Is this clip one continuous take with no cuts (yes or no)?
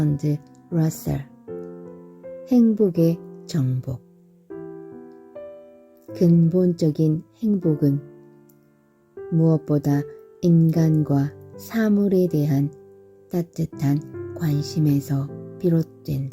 no